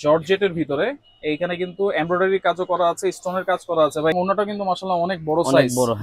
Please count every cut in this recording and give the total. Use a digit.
1